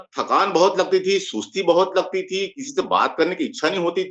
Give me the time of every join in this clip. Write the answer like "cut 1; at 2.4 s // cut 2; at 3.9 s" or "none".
none